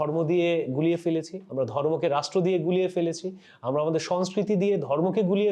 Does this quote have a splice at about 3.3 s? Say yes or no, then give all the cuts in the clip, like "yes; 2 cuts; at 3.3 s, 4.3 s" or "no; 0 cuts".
no; 0 cuts